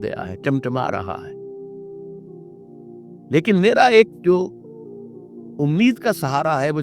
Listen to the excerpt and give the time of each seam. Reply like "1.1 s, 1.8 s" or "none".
1.2 s, 3.3 s